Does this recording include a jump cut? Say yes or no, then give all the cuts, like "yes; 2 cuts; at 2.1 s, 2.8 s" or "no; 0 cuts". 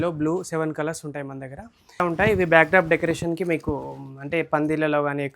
yes; 1 cut; at 2.0 s